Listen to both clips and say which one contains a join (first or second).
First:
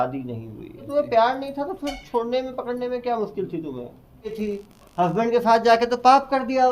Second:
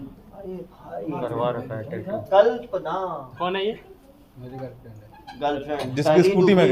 first